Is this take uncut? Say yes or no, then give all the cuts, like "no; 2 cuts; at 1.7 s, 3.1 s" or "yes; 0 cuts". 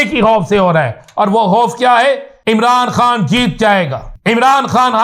no; 2 cuts; at 2.3 s, 4.1 s